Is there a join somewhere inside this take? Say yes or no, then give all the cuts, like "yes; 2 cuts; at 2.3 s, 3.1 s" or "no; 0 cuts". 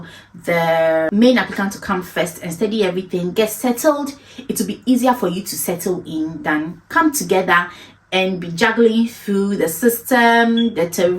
yes; 1 cut; at 1.1 s